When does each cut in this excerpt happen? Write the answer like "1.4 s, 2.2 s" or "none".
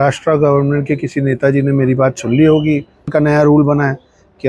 3.1 s